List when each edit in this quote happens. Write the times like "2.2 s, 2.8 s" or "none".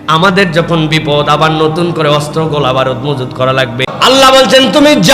3.9 s